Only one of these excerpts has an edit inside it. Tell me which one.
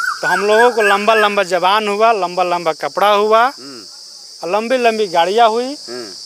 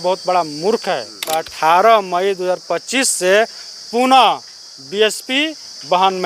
second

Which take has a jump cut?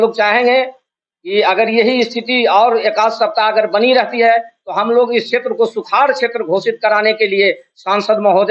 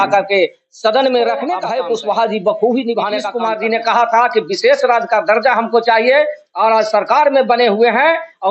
second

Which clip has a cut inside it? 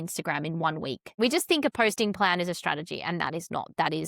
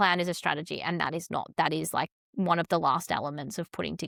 first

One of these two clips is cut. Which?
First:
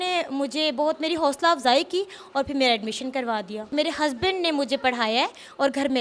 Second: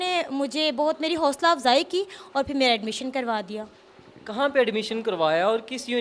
first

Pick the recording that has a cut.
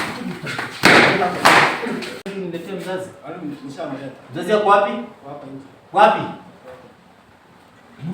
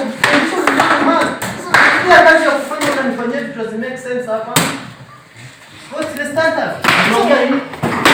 first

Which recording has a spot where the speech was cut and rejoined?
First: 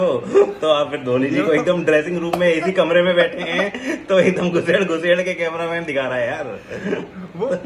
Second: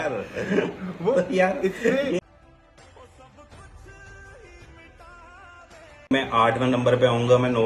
second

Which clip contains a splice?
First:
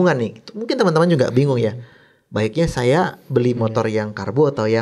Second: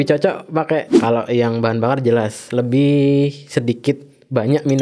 second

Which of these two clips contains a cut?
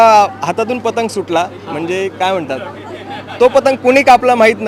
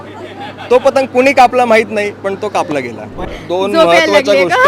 second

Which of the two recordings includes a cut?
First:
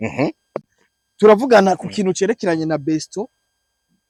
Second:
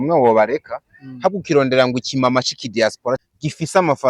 second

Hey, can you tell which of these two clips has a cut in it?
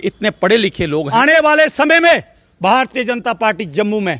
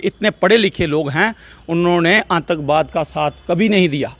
first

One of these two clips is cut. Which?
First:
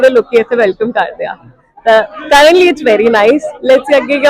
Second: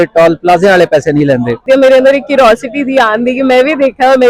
second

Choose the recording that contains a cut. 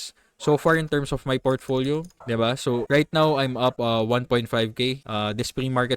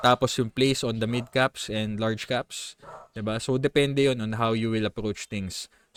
first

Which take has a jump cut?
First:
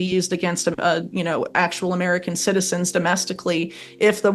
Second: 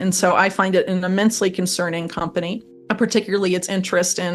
second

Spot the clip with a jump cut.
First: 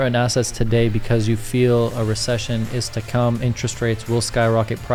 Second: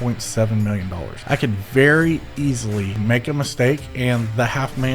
second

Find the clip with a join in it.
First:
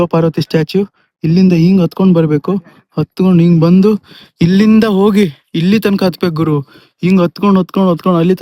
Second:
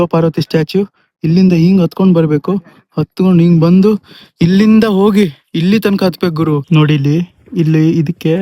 second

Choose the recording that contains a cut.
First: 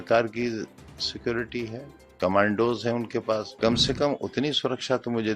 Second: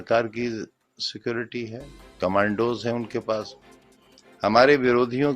first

